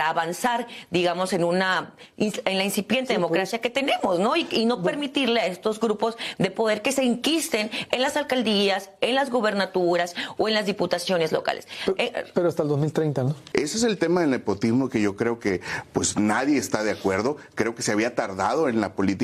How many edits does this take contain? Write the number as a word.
one